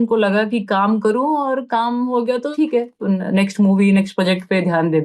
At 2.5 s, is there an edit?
yes; 1 cut; at 2.5 s

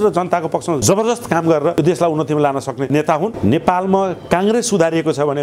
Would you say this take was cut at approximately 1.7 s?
yes; 2 cuts; at 1.7 s, 3.0 s

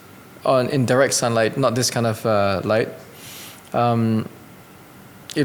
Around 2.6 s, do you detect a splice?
no; 0 cuts

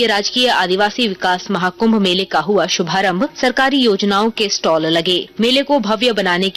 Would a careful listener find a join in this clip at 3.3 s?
yes; 2 cuts; at 3.3 s, 5.3 s

